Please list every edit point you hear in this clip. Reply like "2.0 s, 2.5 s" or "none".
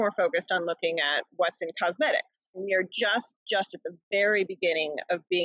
2.6 s